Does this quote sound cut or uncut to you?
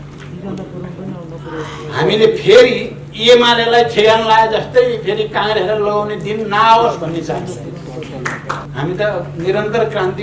cut